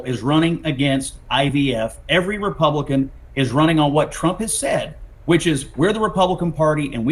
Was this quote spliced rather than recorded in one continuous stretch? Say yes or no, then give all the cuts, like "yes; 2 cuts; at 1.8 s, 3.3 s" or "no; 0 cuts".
no; 0 cuts